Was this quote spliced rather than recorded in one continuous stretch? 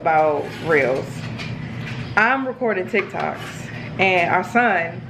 no; 0 cuts

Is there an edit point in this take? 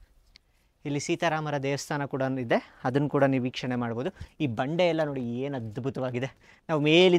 no; 0 cuts

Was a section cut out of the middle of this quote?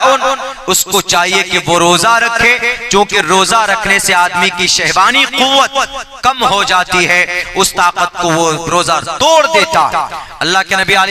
no; 0 cuts

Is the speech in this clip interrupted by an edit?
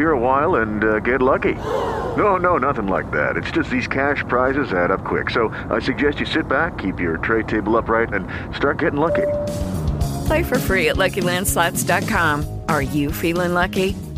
no; 0 cuts

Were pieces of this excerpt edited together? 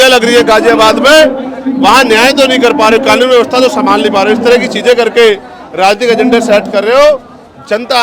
no; 0 cuts

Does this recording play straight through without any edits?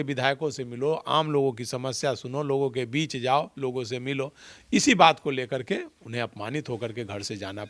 yes; 0 cuts

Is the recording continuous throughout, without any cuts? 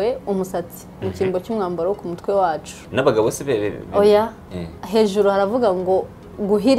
no; 1 cut; at 2.8 s

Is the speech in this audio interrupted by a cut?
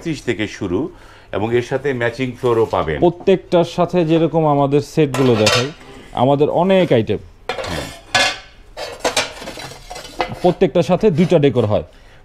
no; 0 cuts

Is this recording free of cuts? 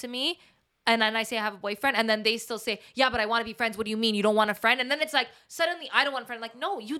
yes; 0 cuts

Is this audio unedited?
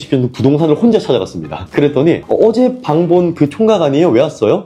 yes; 0 cuts

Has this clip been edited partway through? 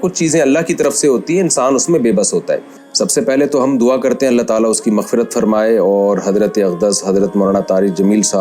yes; 1 cut; at 2.8 s

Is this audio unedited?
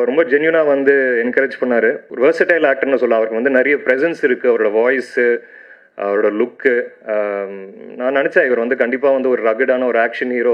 no; 1 cut; at 2.1 s

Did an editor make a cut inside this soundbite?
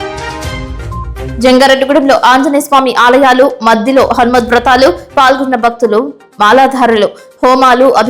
yes; 1 cut; at 1.1 s

